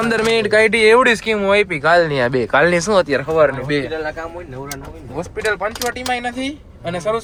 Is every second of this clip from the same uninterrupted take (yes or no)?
yes